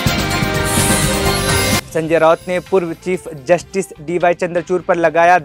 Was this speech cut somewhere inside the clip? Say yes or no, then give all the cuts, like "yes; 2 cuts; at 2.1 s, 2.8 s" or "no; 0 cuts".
no; 0 cuts